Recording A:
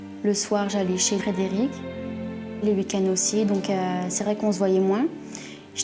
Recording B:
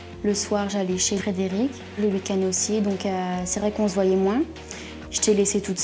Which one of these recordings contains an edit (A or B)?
B